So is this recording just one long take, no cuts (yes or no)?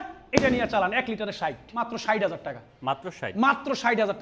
no